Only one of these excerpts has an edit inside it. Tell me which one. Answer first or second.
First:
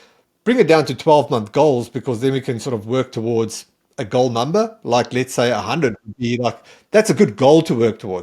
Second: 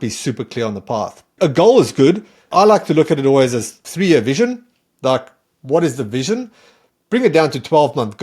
second